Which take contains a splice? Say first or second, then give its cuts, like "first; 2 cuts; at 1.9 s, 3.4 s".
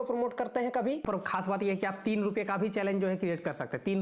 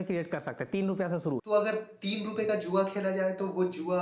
first; 1 cut; at 1.0 s